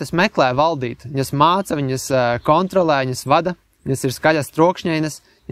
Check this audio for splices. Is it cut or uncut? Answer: uncut